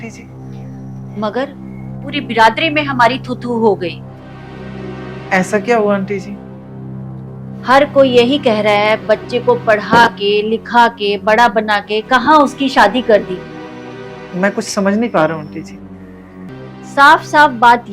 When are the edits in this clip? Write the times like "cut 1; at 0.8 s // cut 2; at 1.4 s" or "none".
cut 1; at 16.5 s